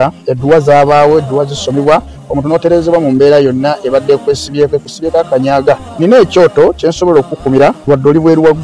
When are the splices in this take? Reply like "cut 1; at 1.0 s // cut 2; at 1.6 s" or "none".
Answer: none